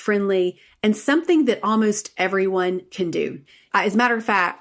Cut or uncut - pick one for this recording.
cut